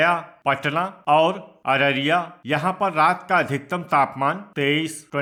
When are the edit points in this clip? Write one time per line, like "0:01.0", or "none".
none